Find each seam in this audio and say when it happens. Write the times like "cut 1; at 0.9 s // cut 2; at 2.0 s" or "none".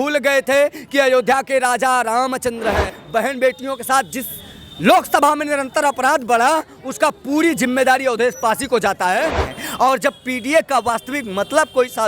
cut 1; at 2.9 s // cut 2; at 9.5 s